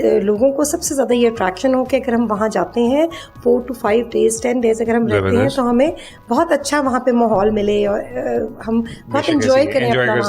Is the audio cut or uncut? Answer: uncut